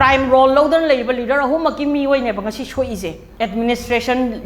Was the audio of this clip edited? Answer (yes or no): yes